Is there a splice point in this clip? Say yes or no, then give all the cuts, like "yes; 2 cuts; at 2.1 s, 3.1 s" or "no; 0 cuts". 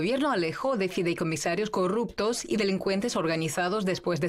yes; 1 cut; at 1.7 s